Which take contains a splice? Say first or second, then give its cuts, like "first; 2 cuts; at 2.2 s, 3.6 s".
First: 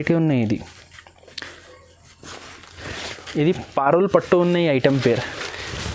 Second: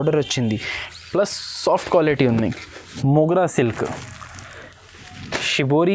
second; 1 cut; at 2.8 s